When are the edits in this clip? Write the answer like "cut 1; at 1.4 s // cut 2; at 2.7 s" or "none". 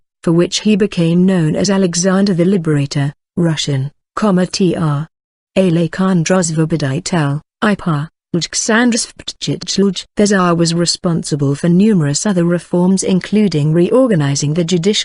cut 1; at 1.9 s